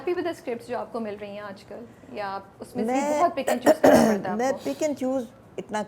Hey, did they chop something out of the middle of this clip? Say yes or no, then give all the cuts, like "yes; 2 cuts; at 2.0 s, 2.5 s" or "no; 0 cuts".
no; 0 cuts